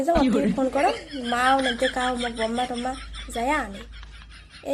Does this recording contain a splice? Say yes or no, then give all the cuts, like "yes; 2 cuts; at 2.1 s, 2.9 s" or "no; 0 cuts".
no; 0 cuts